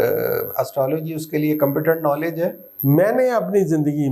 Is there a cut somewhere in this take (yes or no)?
yes